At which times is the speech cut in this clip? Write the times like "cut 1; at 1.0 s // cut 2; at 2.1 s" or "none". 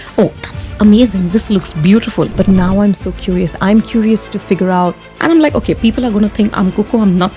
cut 1; at 2.3 s // cut 2; at 5.1 s